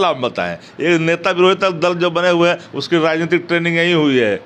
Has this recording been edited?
no; 0 cuts

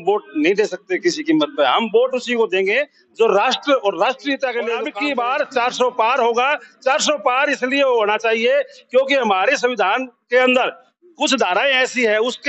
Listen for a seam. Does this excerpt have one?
yes; 1 cut; at 4.9 s

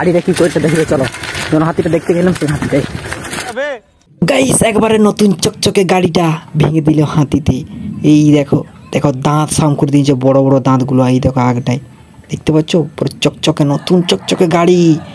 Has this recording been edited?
yes; 1 cut; at 3.5 s

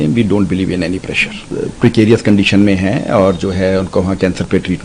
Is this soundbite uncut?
no; 1 cut; at 1.4 s

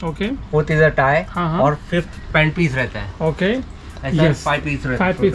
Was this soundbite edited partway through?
no; 0 cuts

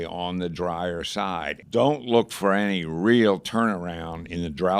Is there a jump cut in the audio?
yes; 1 cut; at 1.5 s

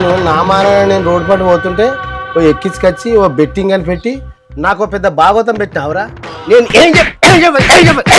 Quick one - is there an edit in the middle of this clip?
no; 0 cuts

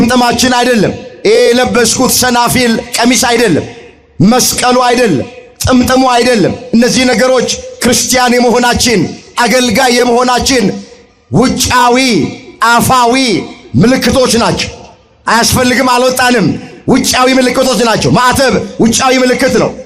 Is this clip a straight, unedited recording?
yes; 0 cuts

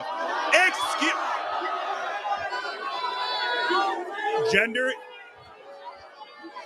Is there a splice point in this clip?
yes; 1 cut; at 4.2 s

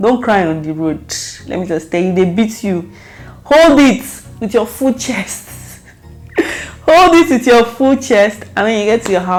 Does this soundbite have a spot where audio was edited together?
no; 0 cuts

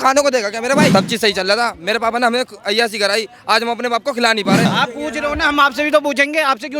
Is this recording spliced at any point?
yes; 2 cuts; at 0.9 s, 4.7 s

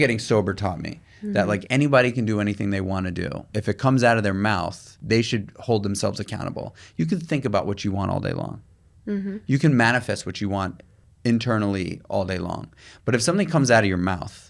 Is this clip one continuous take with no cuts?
no; 2 cuts; at 3.5 s, 4.9 s

